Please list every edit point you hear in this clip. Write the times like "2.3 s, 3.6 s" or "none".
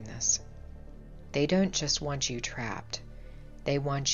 none